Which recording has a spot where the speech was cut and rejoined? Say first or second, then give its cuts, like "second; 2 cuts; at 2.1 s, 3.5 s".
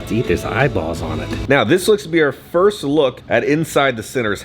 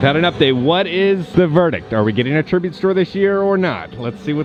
first; 1 cut; at 1.4 s